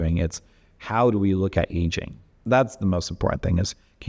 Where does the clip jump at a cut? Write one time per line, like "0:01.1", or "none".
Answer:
0:02.4